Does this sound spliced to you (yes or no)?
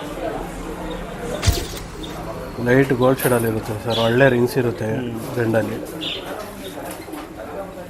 yes